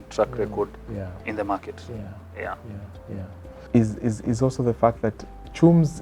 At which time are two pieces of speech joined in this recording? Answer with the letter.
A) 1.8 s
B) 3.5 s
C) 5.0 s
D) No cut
B